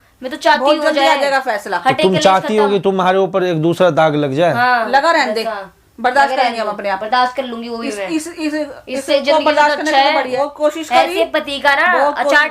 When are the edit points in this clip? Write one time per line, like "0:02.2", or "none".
0:10.3